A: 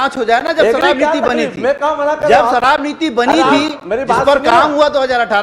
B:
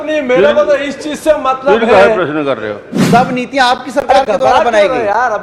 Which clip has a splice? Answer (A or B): B